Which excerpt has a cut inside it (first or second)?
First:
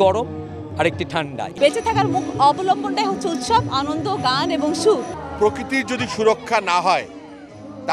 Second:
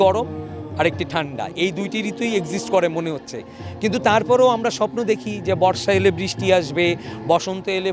first